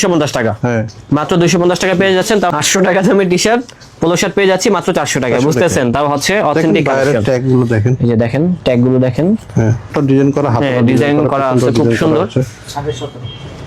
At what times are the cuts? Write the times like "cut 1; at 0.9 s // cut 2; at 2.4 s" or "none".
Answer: cut 1; at 2.5 s // cut 2; at 9.9 s